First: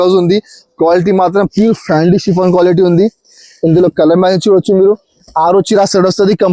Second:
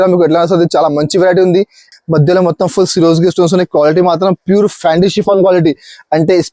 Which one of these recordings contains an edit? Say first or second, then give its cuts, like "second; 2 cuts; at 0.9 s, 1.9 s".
second; 1 cut; at 1.9 s